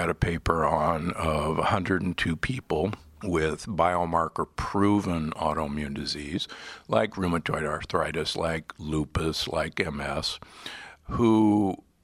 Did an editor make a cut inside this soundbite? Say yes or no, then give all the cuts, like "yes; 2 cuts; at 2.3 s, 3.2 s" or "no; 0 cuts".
yes; 2 cuts; at 3.1 s, 7.8 s